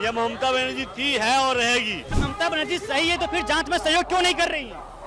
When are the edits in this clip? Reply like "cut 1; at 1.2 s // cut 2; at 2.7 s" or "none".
cut 1; at 2.0 s